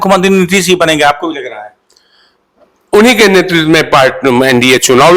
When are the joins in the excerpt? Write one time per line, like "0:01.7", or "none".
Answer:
none